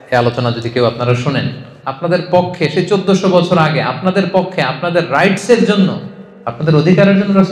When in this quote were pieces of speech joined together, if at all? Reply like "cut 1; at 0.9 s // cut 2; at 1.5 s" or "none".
cut 1; at 1.8 s